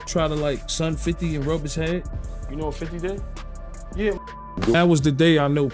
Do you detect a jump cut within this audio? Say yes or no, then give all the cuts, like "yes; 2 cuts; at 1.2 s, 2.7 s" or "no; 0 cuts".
yes; 1 cut; at 4.7 s